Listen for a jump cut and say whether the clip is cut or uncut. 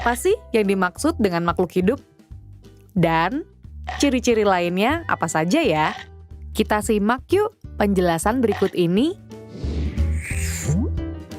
cut